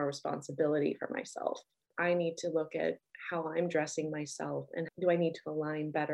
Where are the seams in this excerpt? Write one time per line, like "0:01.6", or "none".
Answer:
none